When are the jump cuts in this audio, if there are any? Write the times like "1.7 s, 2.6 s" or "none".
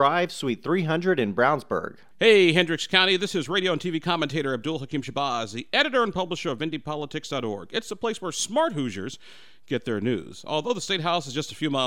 2.0 s